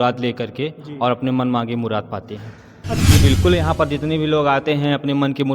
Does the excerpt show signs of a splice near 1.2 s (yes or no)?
no